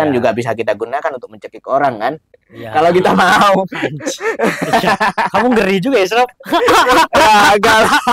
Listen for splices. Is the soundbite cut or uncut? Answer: uncut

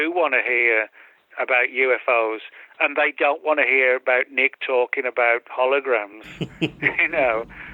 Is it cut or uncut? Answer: uncut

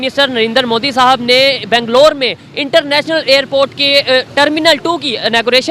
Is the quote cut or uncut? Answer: uncut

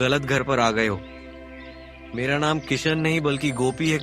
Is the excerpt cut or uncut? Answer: uncut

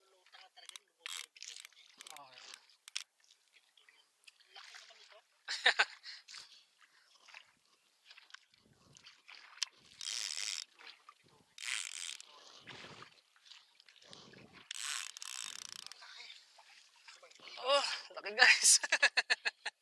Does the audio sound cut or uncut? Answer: uncut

